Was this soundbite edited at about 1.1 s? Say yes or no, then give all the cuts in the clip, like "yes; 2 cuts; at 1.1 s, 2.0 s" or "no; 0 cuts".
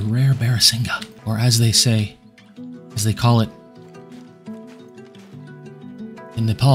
yes; 1 cut; at 1.1 s